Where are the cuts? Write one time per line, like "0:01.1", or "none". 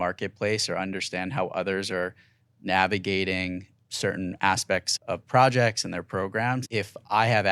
0:03.8
0:04.9
0:06.7